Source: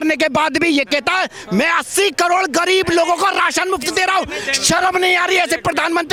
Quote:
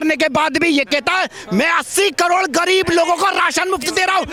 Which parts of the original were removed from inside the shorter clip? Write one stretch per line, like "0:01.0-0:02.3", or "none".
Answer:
none

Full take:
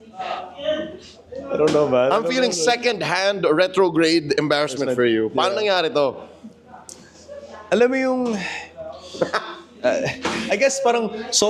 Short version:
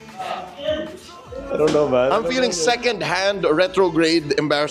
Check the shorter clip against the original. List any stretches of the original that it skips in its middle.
none

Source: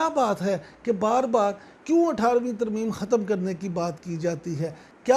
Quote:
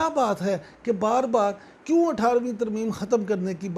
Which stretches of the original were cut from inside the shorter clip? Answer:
none

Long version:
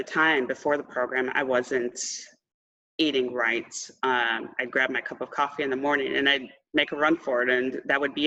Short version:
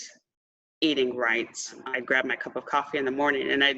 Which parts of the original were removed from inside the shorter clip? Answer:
0:03.9-0:04.4

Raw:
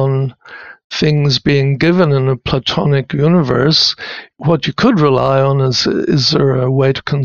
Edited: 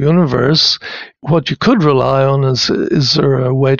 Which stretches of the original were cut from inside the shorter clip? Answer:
none

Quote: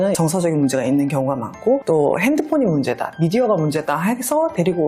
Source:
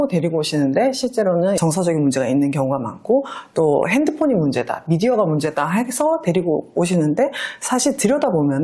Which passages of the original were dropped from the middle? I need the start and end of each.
0:03.3-0:03.5

